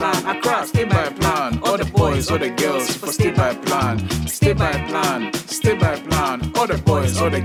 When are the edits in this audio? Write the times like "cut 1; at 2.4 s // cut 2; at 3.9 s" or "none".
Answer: none